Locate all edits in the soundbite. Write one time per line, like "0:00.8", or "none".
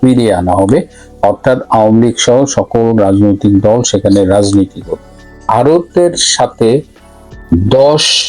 0:05.4